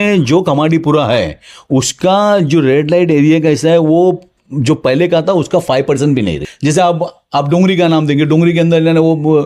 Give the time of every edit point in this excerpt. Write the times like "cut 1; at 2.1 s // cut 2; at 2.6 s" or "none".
cut 1; at 6.5 s